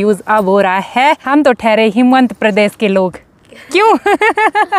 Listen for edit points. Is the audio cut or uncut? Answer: cut